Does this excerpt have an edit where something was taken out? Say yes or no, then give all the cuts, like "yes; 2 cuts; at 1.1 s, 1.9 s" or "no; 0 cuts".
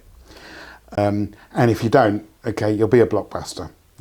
yes; 1 cut; at 1.0 s